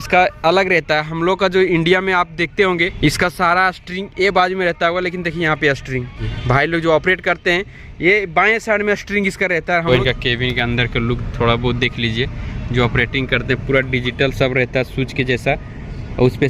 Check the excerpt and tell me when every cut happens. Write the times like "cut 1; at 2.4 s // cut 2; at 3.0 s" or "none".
cut 1; at 2.9 s // cut 2; at 6.3 s // cut 3; at 10.1 s